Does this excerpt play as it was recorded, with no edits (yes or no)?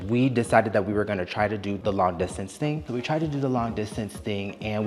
no